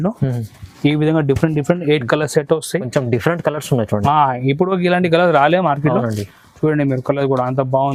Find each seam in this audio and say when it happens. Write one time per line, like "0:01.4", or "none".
none